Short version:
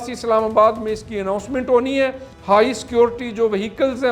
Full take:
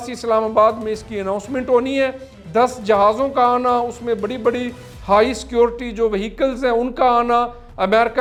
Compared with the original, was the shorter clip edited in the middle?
yes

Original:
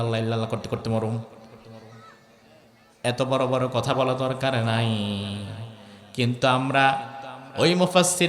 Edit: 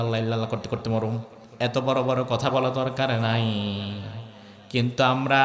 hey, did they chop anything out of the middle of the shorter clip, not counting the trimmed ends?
yes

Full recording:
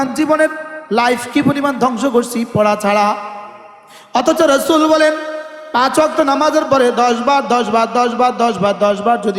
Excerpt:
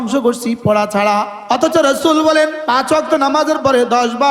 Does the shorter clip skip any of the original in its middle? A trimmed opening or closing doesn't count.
yes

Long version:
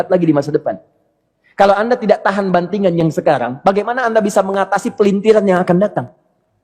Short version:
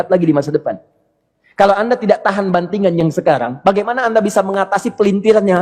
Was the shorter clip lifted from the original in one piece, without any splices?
yes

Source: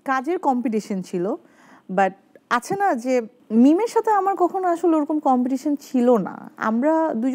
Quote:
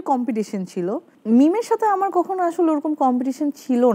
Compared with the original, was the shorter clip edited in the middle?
yes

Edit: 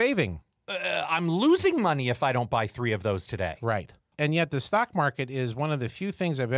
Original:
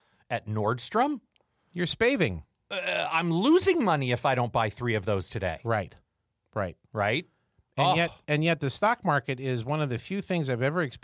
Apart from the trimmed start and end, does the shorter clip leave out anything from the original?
yes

